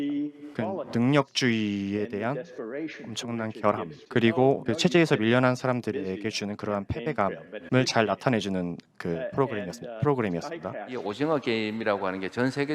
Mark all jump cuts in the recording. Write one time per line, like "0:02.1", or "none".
0:10.9